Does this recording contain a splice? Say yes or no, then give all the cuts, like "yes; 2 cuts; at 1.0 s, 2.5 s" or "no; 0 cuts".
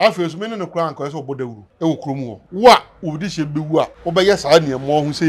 yes; 3 cuts; at 1.6 s, 2.4 s, 4.0 s